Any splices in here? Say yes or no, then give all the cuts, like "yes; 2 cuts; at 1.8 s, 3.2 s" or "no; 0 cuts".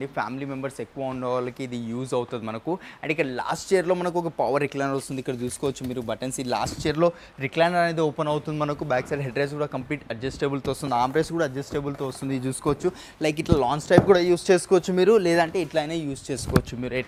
no; 0 cuts